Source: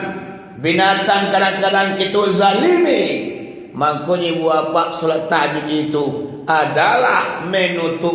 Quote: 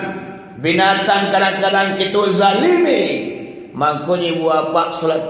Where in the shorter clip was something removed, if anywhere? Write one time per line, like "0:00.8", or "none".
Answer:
none